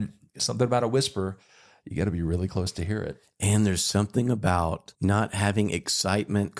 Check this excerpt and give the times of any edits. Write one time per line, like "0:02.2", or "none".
0:04.9